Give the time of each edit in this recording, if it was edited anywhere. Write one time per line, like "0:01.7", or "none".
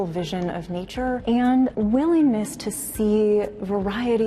0:01.2
0:01.7